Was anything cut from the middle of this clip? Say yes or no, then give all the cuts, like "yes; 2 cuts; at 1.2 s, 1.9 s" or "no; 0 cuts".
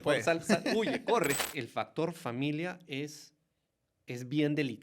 yes; 1 cut; at 1.5 s